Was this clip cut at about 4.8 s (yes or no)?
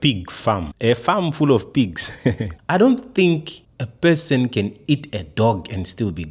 no